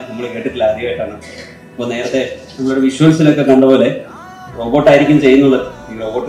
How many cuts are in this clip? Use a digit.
0